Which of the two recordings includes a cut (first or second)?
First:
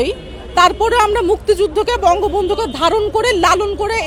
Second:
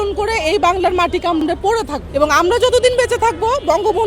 second